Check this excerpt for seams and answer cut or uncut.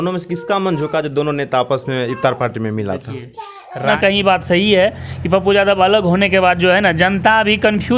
cut